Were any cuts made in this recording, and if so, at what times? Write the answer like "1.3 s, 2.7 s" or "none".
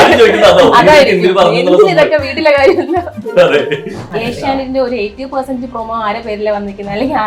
4.1 s